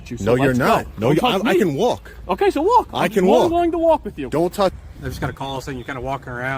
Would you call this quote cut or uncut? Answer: cut